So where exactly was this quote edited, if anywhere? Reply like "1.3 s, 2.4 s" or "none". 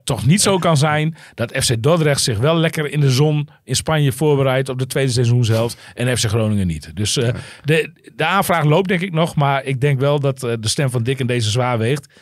none